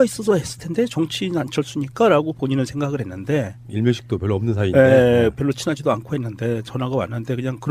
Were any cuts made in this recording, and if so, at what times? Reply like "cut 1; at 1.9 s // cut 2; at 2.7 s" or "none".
cut 1; at 4.5 s